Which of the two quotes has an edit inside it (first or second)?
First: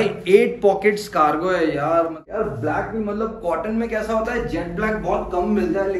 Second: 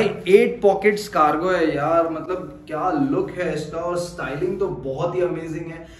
first